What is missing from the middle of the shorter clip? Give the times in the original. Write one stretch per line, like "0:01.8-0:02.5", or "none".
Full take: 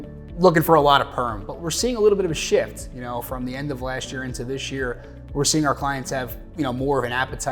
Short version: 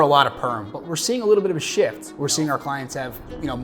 0:02.8-0:05.2